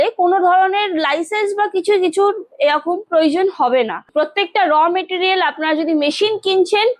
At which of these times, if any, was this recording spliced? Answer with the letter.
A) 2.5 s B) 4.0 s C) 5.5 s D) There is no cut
B